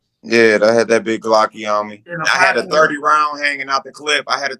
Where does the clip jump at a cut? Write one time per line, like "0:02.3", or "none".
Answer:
0:02.1